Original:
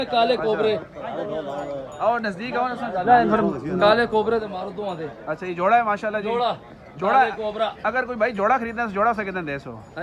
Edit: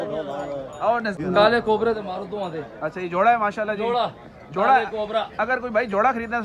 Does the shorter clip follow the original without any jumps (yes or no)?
no